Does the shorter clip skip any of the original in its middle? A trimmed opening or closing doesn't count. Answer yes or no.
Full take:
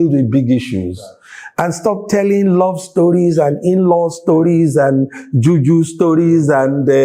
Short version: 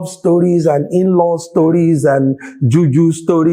no